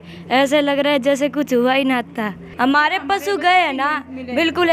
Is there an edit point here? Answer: yes; 1 cut; at 2.4 s

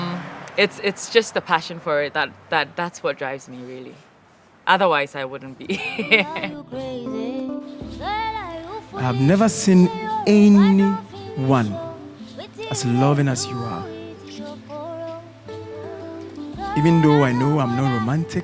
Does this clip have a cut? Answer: yes; 1 cut; at 6.1 s

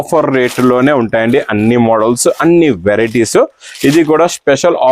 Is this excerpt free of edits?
yes; 0 cuts

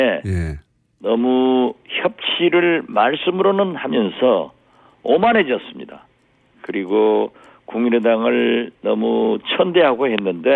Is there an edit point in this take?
no; 0 cuts

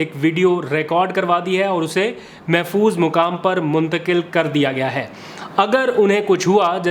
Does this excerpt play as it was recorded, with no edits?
yes; 0 cuts

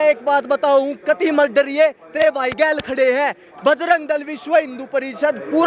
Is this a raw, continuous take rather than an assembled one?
yes; 0 cuts

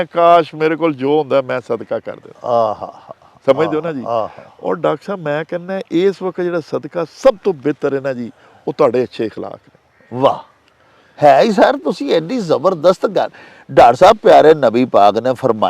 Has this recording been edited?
no; 0 cuts

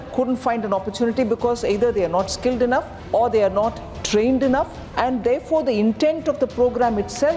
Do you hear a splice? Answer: yes; 2 cuts; at 3.0 s, 4.8 s

